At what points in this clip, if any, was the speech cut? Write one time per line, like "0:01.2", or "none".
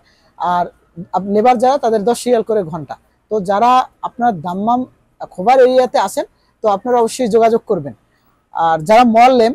none